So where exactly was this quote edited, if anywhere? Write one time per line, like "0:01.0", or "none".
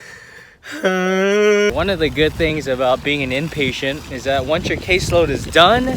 0:01.7